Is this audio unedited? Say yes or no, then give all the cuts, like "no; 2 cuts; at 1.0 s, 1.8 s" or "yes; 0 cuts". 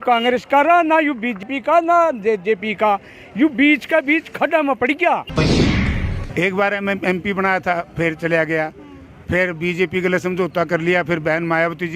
no; 2 cuts; at 1.4 s, 5.7 s